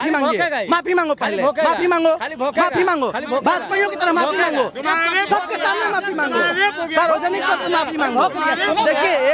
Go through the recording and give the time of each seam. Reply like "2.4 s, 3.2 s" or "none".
none

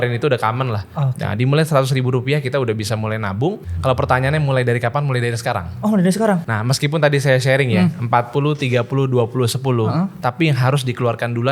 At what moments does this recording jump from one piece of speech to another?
3.7 s, 6.5 s

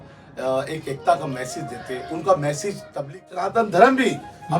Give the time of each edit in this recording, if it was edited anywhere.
3.5 s

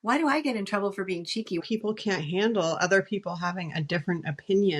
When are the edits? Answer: 1.6 s

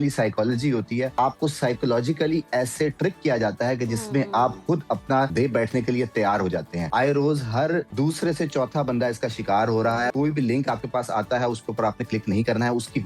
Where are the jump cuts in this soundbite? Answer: 1.1 s, 5.3 s, 6.8 s, 7.9 s, 10.1 s

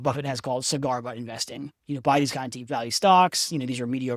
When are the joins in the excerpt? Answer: none

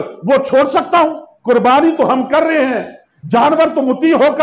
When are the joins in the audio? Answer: 1.3 s

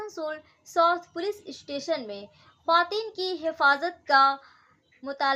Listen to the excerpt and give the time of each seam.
none

